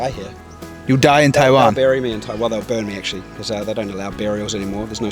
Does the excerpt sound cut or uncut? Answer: uncut